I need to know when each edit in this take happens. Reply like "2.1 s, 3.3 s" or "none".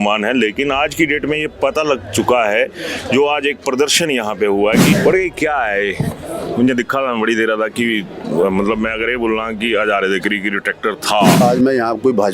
4.9 s, 11.4 s